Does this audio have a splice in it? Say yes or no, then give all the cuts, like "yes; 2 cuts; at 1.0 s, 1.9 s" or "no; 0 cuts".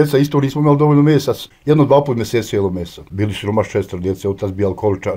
yes; 2 cuts; at 1.5 s, 3.1 s